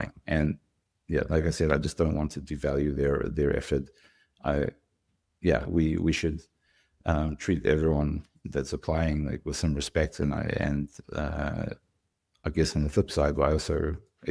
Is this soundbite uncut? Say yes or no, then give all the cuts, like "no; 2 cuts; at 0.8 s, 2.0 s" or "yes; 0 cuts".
yes; 0 cuts